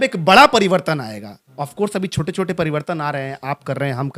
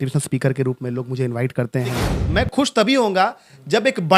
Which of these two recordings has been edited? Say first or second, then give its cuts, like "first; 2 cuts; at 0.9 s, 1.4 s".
second; 1 cut; at 2.1 s